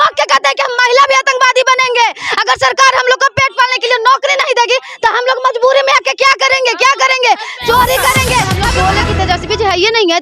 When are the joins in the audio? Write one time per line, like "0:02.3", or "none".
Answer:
0:08.6